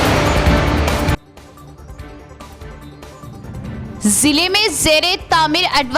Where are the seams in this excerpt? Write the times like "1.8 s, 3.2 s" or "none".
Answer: 1.0 s